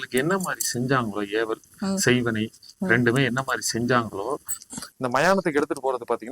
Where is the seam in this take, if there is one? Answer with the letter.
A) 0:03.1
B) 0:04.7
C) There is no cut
B